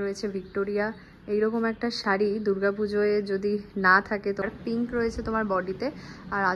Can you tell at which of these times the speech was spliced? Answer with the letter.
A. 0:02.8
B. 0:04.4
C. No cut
B